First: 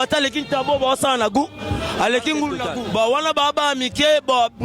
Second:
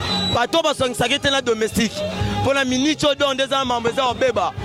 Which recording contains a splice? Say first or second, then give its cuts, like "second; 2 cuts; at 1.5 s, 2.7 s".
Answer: first; 1 cut; at 2.6 s